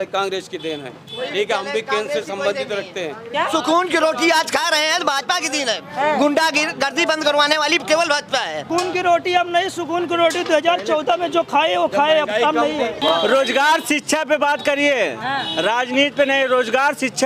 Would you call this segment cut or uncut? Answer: cut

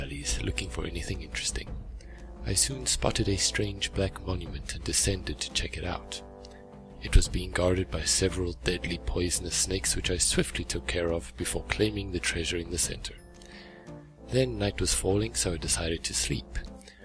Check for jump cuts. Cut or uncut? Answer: uncut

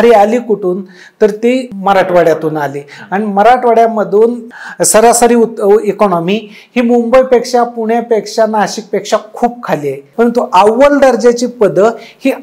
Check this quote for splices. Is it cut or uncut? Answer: cut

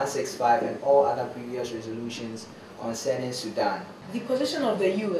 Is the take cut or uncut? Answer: cut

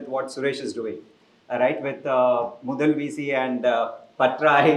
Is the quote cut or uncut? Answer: uncut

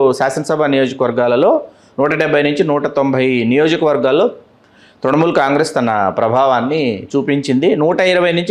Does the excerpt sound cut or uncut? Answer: uncut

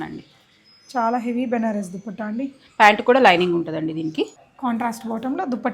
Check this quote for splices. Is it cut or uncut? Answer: cut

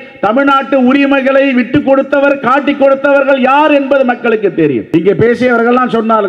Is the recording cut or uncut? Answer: cut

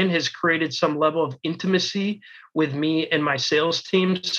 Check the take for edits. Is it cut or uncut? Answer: uncut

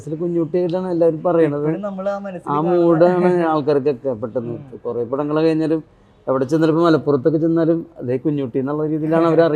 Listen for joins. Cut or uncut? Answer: uncut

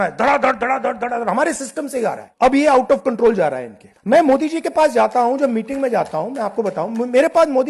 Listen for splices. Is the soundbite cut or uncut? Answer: cut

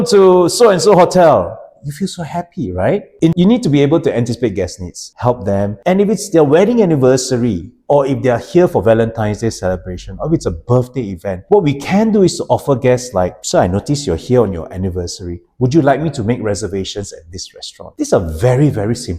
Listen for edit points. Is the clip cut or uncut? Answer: cut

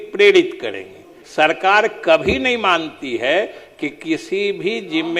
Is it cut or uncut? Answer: cut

